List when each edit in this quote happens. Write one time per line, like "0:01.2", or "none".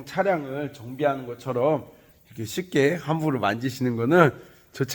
none